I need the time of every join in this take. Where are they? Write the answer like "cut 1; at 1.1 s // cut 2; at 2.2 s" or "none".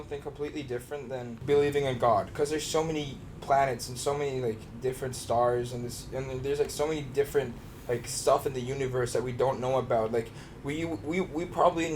cut 1; at 1.4 s